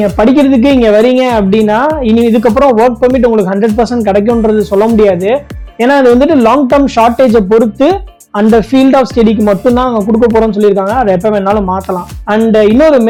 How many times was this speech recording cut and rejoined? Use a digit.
0